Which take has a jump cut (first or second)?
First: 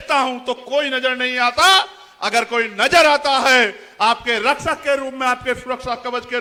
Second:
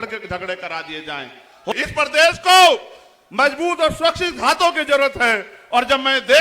second